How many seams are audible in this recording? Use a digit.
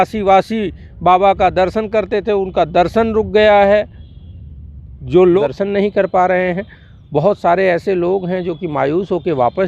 1